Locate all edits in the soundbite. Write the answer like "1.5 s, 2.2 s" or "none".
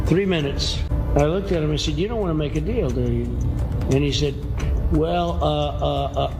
0.9 s